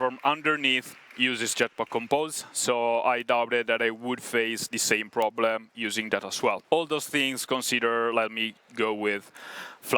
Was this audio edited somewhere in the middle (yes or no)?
yes